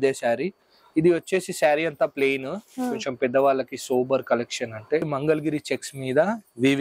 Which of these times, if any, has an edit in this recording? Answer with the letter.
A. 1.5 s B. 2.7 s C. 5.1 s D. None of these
C